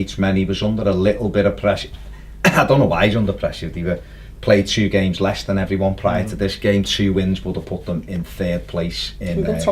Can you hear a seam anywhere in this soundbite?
yes; 1 cut; at 7.4 s

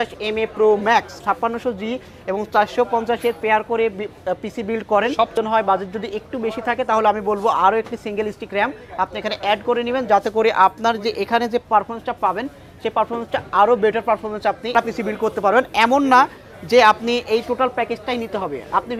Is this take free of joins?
no; 3 cuts; at 1.1 s, 5.4 s, 14.8 s

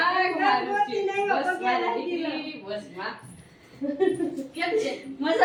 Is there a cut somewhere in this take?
no; 0 cuts

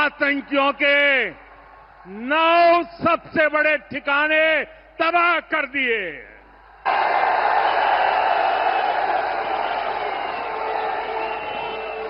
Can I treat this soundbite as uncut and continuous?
yes; 0 cuts

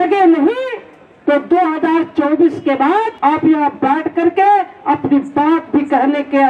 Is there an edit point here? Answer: yes; 1 cut; at 3.1 s

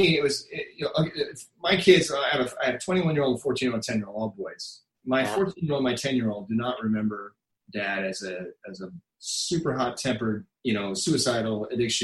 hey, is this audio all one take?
no; 1 cut; at 10.5 s

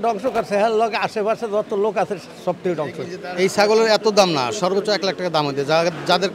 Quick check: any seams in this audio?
yes; 1 cut; at 3.4 s

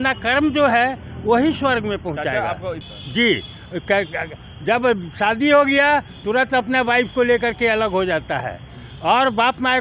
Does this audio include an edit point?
no; 0 cuts

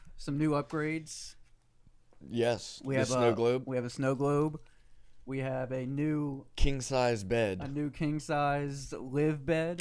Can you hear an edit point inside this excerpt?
no; 0 cuts

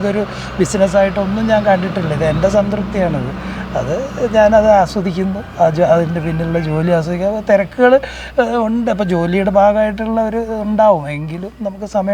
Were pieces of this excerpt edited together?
no; 0 cuts

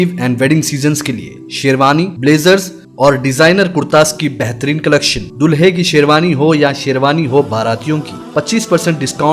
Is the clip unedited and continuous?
yes; 0 cuts

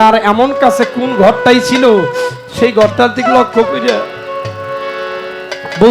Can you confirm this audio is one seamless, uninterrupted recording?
yes; 0 cuts

